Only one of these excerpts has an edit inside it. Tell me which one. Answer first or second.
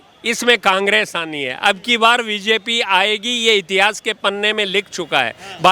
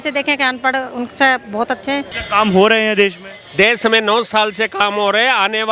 second